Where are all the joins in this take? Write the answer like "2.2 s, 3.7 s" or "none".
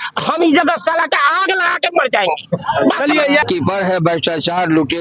3.4 s